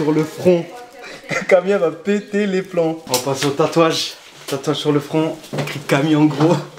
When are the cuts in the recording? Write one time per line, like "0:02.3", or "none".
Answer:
none